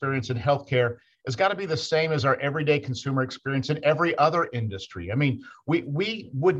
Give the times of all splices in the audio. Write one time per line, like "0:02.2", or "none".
none